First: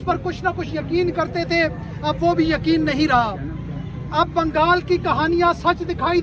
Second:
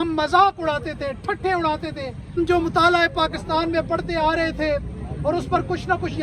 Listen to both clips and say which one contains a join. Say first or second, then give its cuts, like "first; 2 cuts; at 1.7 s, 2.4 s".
second; 1 cut; at 2.4 s